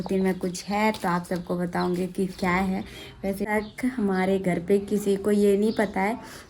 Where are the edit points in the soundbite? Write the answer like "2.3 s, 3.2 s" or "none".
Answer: 3.5 s